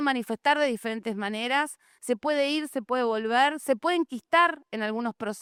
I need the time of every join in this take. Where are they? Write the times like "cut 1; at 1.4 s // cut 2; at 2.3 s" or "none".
none